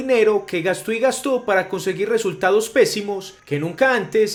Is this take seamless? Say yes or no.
yes